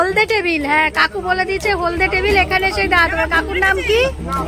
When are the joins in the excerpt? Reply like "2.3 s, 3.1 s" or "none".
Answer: none